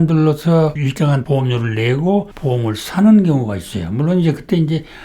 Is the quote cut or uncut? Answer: cut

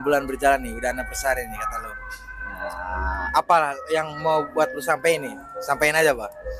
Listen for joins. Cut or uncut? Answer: uncut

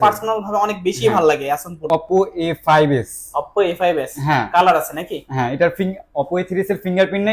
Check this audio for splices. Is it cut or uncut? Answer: cut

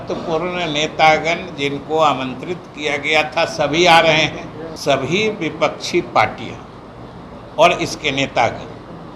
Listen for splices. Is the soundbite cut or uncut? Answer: cut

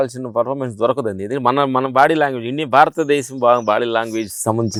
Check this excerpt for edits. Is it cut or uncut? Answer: uncut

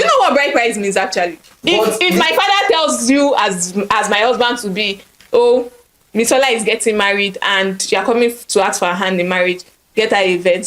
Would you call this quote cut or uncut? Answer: cut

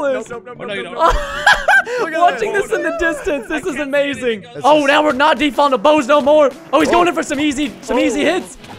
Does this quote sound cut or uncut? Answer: cut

